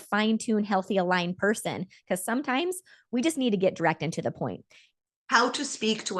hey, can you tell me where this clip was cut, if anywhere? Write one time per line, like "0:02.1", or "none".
0:04.7